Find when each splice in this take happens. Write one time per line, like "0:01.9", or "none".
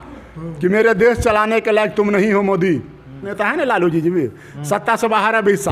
0:03.3

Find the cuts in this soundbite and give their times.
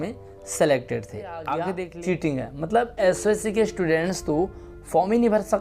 0:01.7

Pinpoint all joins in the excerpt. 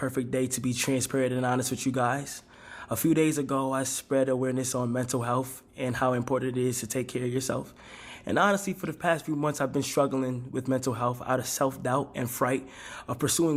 none

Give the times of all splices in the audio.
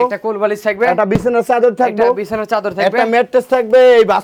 none

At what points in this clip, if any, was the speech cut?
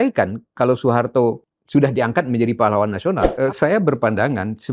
0:01.5
0:03.3

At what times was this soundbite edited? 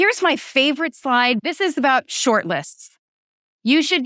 0:01.4

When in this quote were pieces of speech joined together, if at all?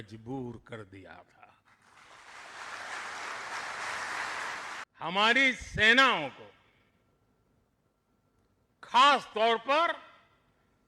0:04.8

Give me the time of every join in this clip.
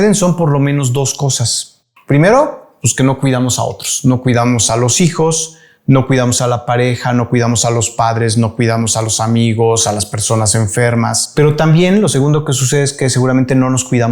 0:11.2

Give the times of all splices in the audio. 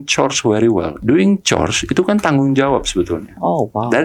0:00.9

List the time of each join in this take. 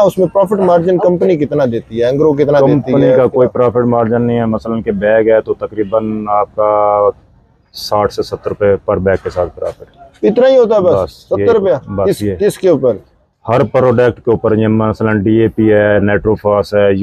none

